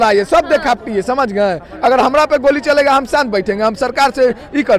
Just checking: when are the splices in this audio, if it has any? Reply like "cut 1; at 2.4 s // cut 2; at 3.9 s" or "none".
none